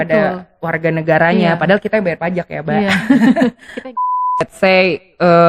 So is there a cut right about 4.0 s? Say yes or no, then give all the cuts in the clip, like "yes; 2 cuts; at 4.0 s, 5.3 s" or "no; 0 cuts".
yes; 1 cut; at 4.0 s